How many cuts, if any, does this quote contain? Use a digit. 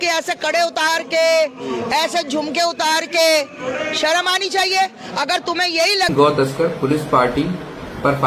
1